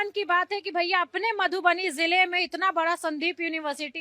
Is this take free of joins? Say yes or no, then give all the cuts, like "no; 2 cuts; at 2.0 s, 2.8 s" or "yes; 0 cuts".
yes; 0 cuts